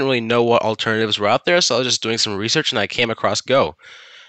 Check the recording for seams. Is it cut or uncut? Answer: uncut